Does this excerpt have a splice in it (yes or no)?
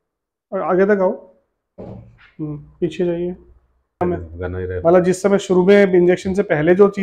yes